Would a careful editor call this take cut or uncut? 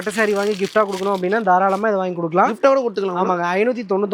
uncut